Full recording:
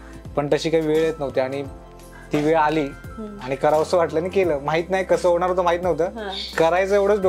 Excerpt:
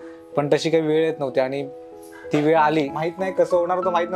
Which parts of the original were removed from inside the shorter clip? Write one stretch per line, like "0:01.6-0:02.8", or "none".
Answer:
0:03.0-0:04.7